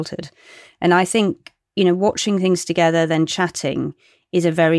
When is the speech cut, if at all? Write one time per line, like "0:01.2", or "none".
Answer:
none